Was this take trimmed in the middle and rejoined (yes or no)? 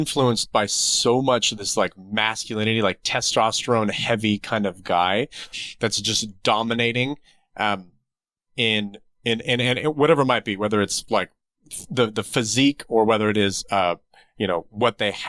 no